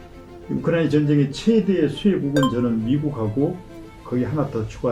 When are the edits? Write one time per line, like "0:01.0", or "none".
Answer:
none